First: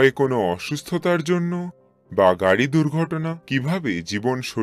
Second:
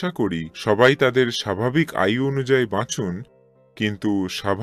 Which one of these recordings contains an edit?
first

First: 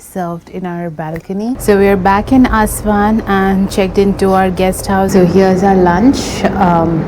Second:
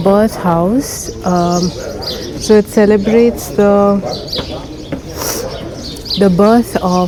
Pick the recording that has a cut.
first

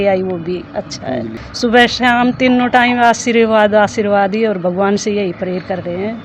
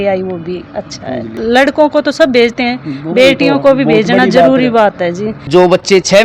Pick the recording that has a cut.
second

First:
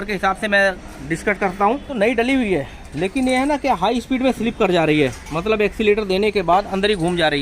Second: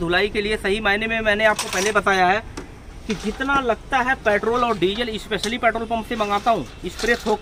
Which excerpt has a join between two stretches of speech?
first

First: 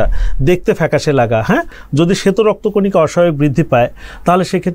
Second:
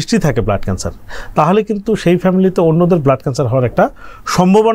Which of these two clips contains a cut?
first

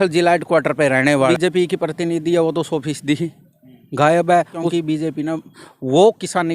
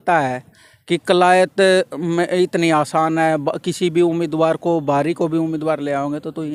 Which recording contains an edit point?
first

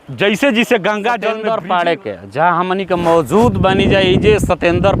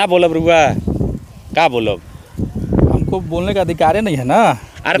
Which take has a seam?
first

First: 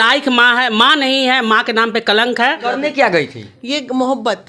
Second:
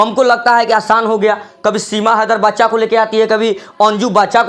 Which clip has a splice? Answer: first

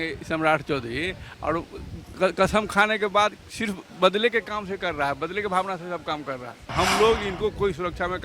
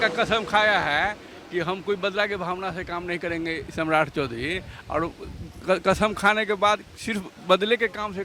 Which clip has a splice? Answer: first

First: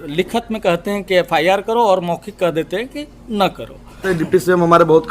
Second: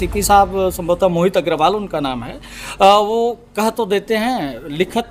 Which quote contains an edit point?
first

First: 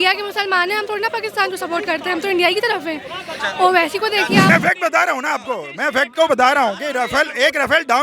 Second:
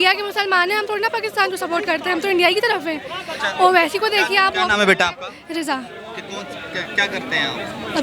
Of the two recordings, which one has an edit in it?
first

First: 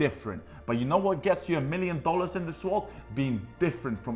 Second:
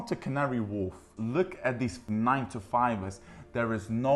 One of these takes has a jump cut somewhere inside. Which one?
second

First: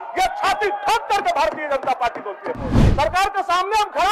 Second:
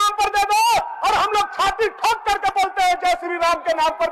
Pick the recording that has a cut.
first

